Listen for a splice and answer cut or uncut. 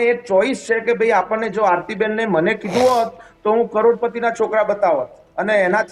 uncut